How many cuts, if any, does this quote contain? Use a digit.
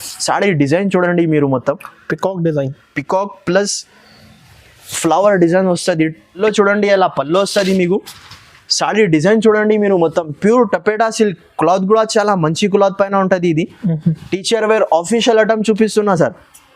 1